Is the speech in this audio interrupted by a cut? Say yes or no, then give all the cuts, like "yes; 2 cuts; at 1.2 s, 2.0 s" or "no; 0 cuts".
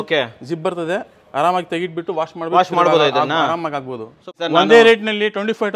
yes; 1 cut; at 4.3 s